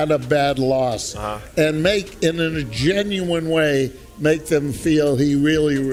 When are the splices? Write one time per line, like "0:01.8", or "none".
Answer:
none

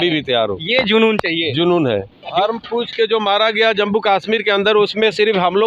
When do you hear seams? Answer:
0:02.3

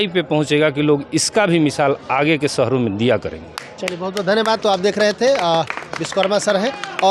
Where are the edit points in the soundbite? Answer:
none

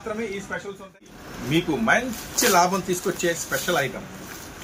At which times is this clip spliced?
0:01.2

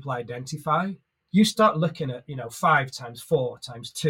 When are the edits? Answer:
0:01.1

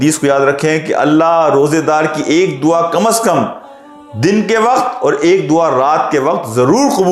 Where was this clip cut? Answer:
none

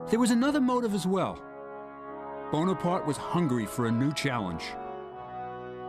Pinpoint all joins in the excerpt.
none

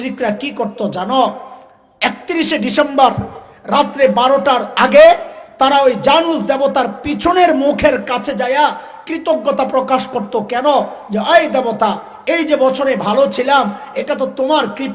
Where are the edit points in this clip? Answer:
none

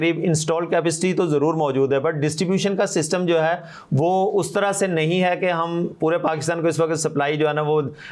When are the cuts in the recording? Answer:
none

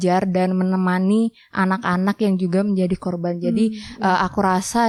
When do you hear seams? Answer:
none

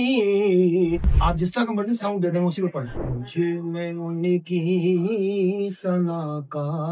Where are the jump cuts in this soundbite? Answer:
0:01.1
0:02.9

